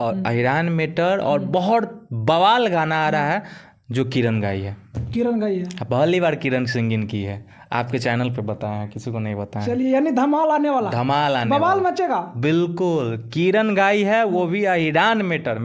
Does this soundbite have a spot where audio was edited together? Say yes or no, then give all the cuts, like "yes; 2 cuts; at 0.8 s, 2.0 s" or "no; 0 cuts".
no; 0 cuts